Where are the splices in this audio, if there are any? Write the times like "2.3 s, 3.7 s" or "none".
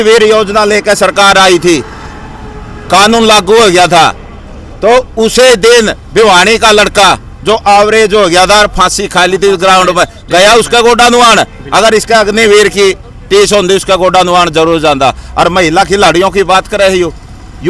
none